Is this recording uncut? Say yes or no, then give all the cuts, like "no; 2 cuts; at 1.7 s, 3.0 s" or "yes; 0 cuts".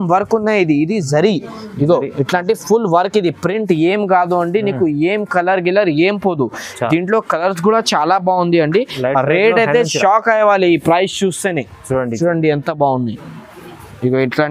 yes; 0 cuts